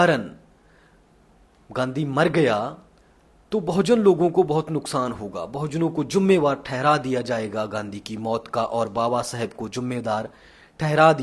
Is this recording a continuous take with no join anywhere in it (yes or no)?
yes